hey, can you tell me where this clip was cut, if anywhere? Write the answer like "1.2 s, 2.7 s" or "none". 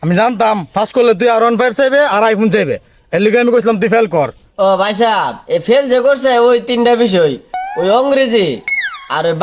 4.4 s